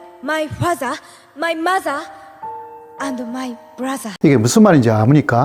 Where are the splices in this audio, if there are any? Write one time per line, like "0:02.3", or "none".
none